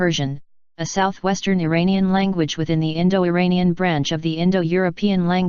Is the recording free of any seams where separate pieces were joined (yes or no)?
yes